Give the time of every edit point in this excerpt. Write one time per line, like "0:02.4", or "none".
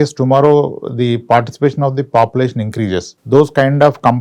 0:03.1